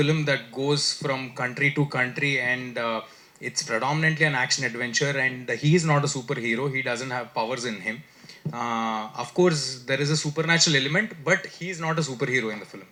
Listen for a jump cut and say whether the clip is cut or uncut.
uncut